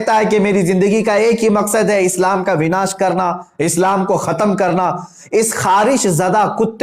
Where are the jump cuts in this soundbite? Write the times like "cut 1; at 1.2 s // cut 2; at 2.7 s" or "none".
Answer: none